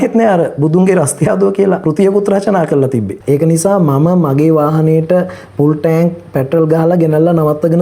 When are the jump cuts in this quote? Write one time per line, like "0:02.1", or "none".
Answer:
0:01.8
0:03.1